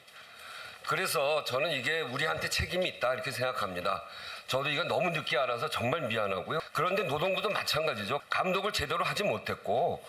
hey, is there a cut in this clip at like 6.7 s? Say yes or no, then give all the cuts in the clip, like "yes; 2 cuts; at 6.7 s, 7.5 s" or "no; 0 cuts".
yes; 2 cuts; at 6.7 s, 8.3 s